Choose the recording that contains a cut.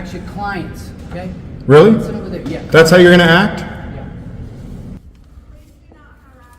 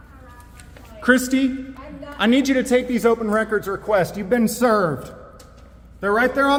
first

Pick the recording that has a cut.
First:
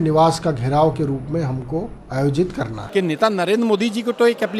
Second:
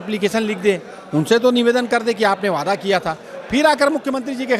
first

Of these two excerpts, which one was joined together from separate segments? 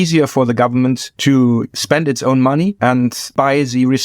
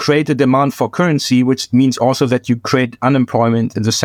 first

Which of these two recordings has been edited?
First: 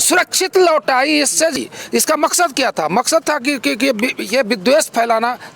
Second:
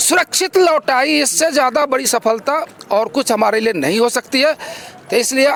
first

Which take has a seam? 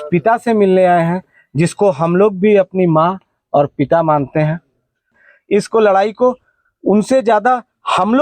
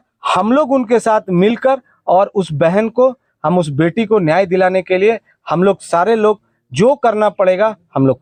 first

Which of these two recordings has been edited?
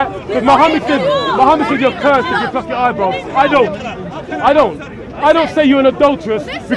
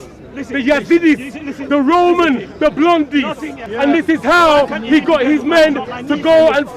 second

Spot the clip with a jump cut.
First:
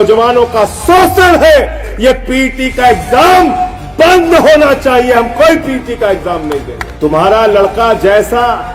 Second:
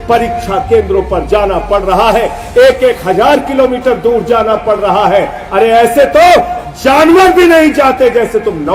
first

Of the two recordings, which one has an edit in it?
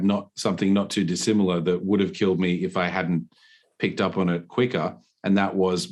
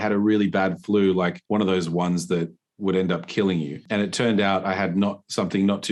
second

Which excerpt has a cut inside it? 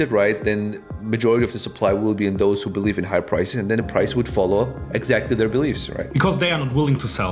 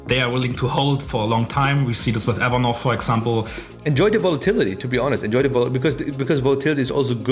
second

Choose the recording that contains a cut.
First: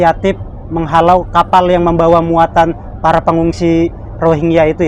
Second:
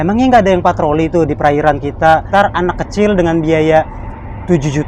second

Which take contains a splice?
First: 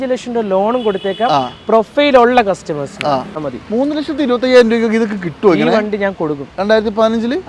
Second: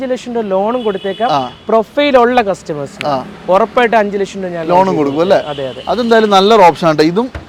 first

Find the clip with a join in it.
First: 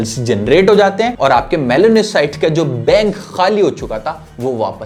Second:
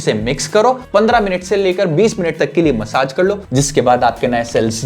second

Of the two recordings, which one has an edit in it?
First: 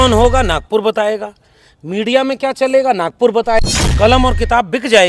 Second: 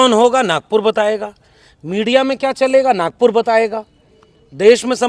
first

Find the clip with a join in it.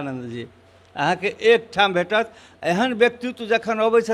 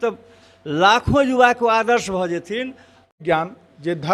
second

